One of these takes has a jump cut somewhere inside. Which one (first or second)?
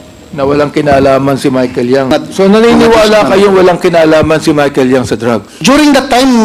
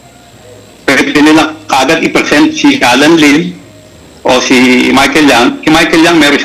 first